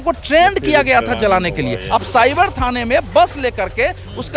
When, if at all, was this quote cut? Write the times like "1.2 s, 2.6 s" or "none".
1.8 s